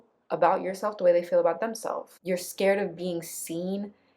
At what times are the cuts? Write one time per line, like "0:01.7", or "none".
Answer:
0:02.1